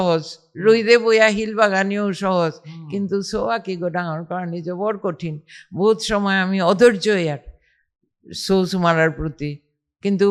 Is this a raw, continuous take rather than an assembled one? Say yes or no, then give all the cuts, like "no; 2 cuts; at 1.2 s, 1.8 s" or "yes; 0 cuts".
yes; 0 cuts